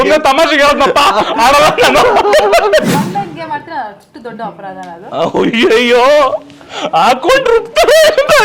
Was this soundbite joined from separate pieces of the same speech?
yes; 1 cut; at 2.9 s

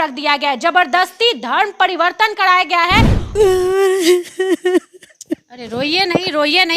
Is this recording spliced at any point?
yes; 1 cut; at 3.1 s

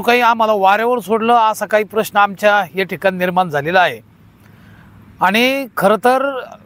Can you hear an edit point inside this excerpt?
no; 0 cuts

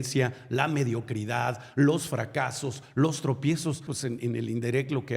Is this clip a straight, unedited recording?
no; 1 cut; at 3.9 s

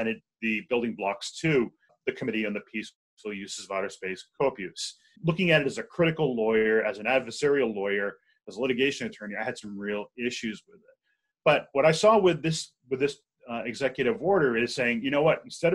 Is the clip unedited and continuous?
no; 2 cuts; at 1.9 s, 5.2 s

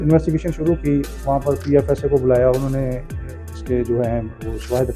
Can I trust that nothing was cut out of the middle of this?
yes; 0 cuts

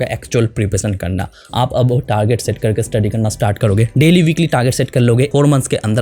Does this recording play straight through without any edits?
yes; 0 cuts

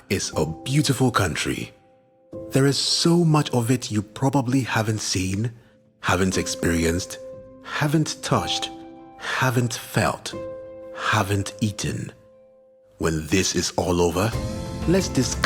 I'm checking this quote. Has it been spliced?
no; 0 cuts

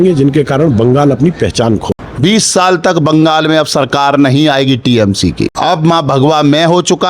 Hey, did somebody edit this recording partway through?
yes; 2 cuts; at 2.0 s, 5.5 s

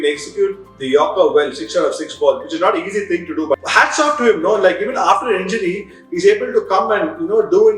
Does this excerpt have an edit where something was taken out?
yes; 1 cut; at 3.5 s

